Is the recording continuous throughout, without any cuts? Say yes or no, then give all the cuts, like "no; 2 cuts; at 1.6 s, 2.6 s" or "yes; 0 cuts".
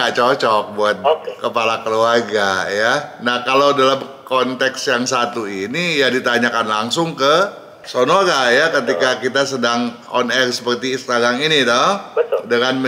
yes; 0 cuts